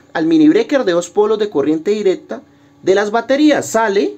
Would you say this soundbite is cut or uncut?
uncut